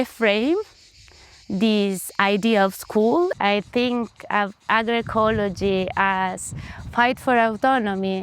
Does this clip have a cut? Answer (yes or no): yes